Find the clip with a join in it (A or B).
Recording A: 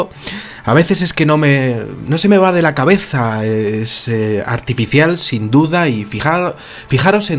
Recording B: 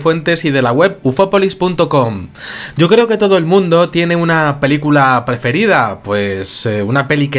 A